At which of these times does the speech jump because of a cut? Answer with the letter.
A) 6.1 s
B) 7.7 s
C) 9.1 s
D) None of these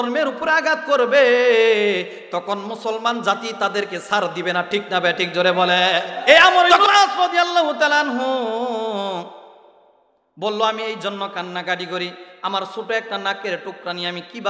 A